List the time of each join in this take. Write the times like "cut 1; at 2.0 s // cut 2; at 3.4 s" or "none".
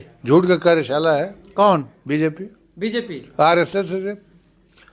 none

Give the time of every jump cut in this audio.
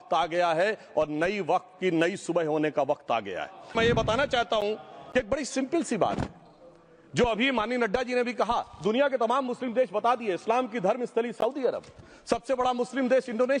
cut 1; at 3.7 s

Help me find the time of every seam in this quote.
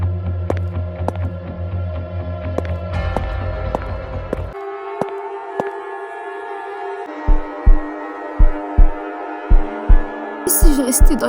cut 1; at 4.6 s // cut 2; at 7.1 s

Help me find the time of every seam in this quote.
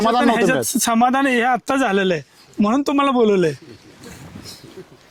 none

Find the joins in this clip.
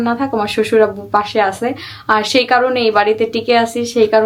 none

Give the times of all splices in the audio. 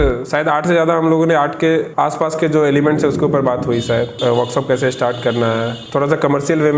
cut 1; at 1.9 s // cut 2; at 4.1 s // cut 3; at 5.8 s

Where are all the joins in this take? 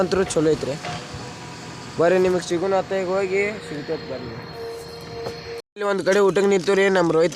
cut 1; at 5.5 s

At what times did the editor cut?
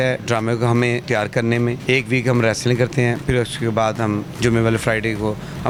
none

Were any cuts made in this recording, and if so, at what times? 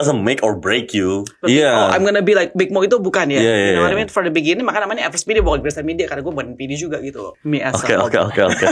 cut 1; at 1.3 s // cut 2; at 2.5 s // cut 3; at 7.3 s

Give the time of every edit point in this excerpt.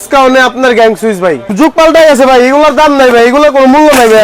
cut 1; at 1.5 s

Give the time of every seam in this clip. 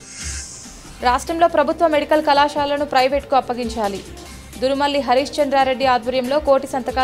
cut 1; at 1.0 s

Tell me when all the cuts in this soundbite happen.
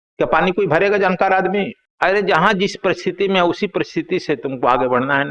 cut 1; at 1.8 s

